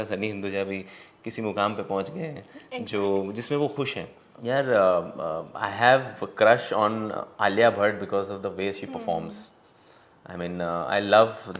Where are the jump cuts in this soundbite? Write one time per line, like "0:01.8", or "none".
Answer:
0:04.2